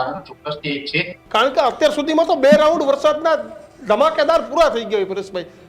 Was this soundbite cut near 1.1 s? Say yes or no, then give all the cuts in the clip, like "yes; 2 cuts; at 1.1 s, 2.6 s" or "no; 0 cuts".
yes; 1 cut; at 1.1 s